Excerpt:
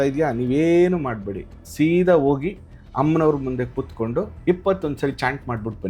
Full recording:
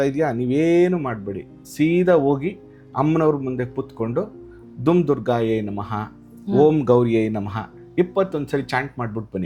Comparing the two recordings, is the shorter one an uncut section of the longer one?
no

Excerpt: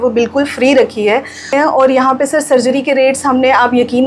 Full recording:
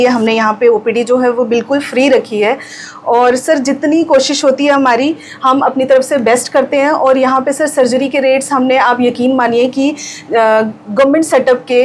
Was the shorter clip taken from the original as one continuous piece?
no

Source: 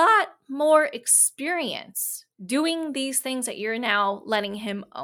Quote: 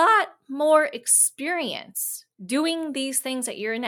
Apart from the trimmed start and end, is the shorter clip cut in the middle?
no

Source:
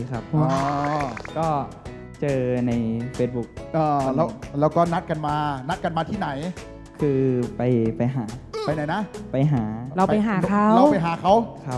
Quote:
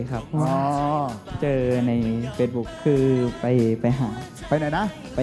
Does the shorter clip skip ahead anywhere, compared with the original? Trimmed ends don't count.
yes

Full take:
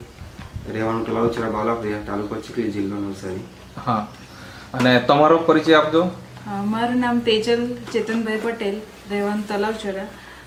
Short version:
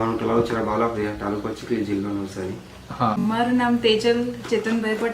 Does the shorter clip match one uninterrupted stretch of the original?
no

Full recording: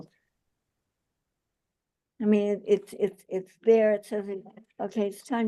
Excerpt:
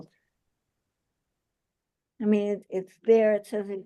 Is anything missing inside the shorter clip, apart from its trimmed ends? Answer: yes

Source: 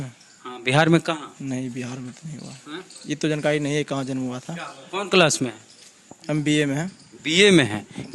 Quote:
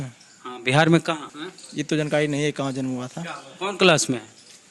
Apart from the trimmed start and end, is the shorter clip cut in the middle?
yes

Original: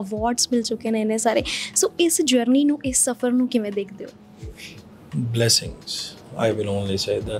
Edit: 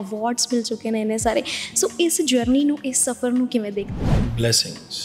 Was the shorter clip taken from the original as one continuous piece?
no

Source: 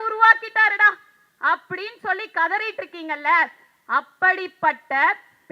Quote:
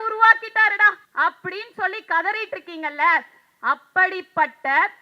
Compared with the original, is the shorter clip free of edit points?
no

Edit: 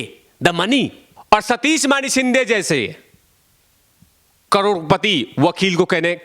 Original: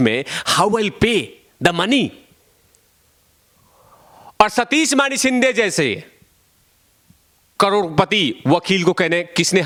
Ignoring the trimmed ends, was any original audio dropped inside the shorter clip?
yes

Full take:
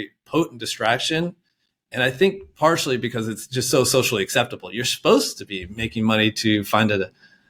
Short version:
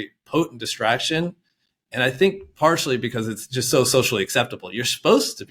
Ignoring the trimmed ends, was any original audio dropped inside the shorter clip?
no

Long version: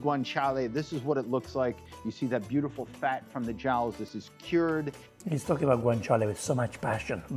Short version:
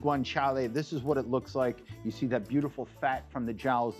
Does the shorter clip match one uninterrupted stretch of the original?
yes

